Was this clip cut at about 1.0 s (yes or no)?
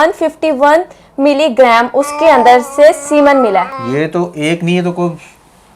no